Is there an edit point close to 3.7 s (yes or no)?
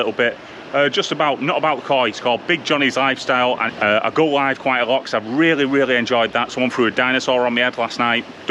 yes